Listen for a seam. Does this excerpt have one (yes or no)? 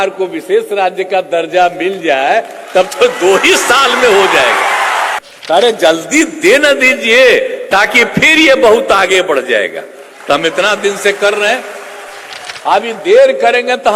yes